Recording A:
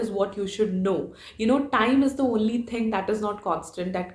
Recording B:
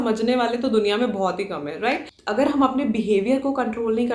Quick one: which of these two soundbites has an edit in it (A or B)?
B